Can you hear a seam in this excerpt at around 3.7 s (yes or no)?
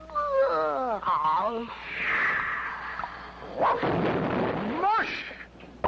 yes